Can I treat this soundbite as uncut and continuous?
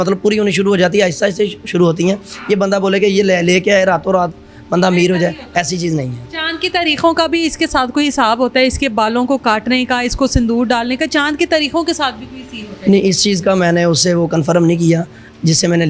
yes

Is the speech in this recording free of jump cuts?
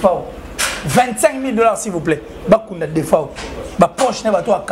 yes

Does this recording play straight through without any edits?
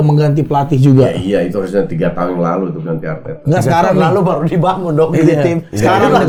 yes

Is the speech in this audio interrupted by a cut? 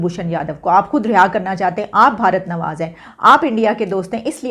no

